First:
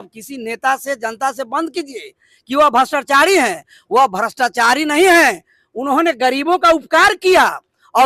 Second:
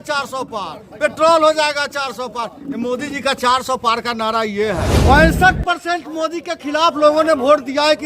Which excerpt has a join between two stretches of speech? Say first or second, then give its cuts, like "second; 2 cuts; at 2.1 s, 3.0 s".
second; 1 cut; at 5.0 s